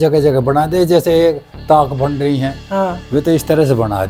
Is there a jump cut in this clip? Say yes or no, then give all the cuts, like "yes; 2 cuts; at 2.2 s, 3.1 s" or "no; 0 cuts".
no; 0 cuts